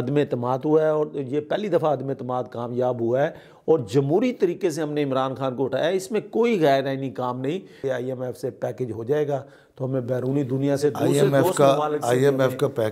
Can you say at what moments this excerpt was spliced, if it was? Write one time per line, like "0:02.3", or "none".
0:07.8